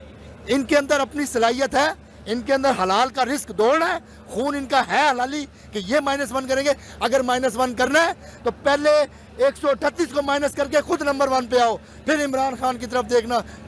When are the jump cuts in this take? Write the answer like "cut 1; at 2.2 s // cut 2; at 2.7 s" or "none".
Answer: none